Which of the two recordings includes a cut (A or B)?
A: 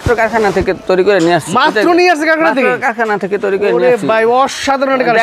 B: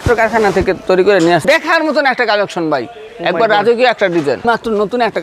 B